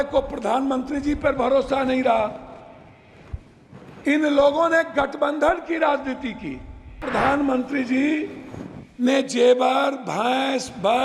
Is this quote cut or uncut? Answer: cut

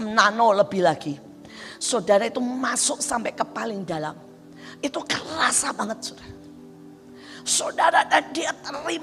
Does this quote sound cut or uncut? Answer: uncut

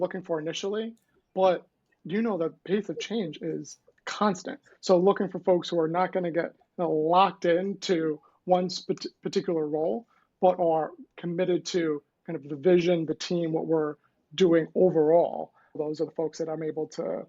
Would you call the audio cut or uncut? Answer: cut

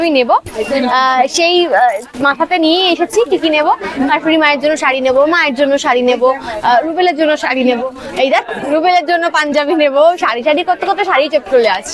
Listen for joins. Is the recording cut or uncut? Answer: uncut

